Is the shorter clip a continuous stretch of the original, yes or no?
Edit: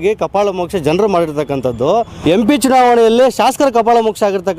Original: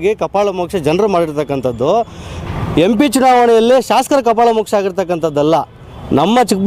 no